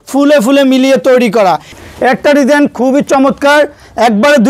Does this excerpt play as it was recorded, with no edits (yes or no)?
no